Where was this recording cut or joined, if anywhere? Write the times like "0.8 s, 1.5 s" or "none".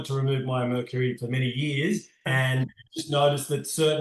2.3 s